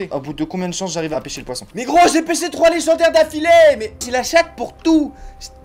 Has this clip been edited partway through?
yes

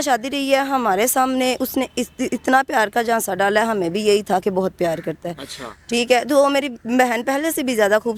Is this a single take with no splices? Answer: yes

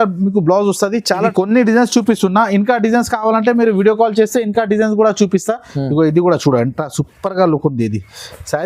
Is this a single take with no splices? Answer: no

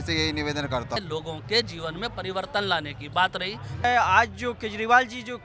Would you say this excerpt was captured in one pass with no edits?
no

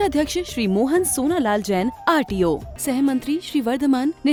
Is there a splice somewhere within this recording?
no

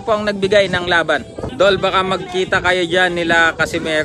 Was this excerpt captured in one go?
no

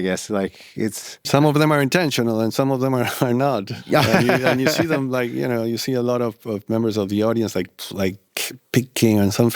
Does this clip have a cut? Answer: yes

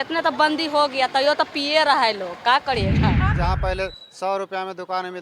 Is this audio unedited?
no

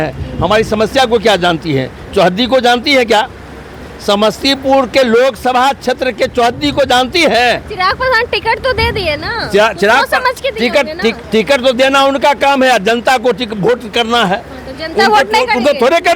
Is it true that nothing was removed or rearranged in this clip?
yes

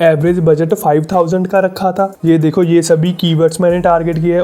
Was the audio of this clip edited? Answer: yes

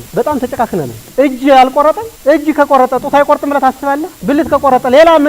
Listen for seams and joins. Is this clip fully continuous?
no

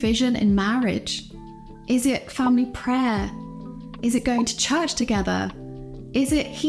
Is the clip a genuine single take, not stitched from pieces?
yes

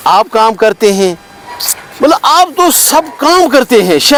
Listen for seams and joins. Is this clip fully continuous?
yes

